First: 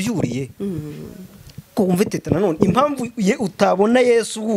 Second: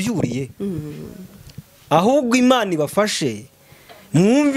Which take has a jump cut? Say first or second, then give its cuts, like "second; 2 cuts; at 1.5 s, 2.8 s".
first; 1 cut; at 1.7 s